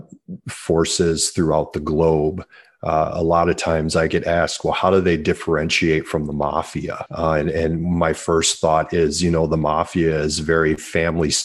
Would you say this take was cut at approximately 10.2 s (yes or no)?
no